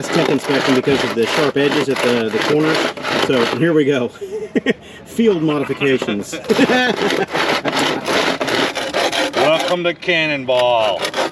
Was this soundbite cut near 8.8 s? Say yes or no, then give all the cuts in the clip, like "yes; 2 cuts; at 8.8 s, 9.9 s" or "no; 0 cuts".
yes; 1 cut; at 8.8 s